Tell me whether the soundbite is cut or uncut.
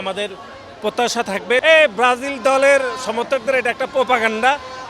cut